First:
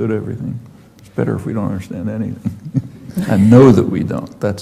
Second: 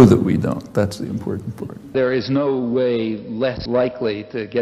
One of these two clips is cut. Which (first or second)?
second